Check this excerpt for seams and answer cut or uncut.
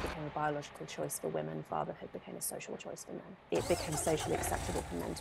cut